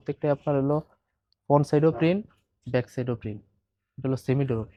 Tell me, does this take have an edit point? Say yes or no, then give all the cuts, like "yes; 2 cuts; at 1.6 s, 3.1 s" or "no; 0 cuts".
no; 0 cuts